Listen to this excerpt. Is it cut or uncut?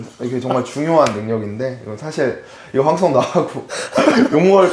uncut